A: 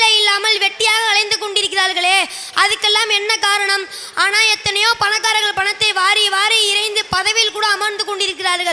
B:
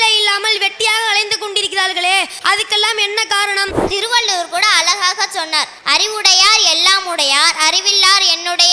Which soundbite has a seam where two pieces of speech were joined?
B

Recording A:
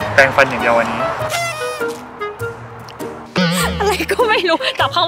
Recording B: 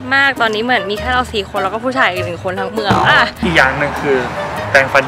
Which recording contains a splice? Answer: B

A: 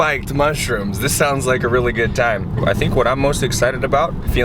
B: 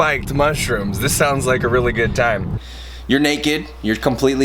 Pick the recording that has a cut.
B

